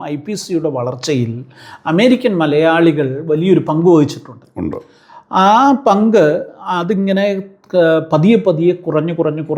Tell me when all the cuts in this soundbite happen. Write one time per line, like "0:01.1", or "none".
none